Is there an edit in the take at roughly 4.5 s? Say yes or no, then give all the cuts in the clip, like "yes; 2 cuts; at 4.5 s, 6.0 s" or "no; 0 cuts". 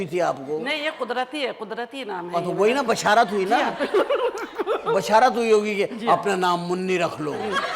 no; 0 cuts